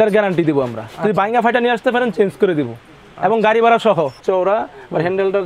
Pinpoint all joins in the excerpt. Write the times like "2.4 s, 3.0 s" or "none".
4.2 s